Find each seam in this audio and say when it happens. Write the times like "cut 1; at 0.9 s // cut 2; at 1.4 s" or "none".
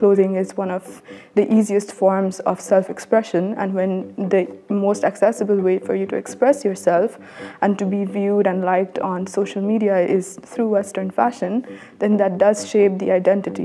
none